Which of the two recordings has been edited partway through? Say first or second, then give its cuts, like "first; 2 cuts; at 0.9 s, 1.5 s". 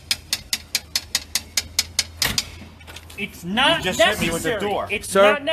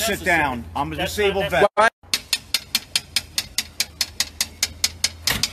second; 1 cut; at 2.0 s